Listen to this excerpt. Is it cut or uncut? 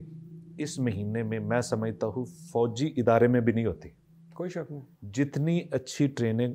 uncut